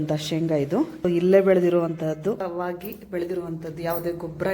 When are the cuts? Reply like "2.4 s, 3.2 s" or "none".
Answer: 1.0 s